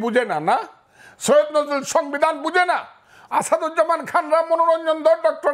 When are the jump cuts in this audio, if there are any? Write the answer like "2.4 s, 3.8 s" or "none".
none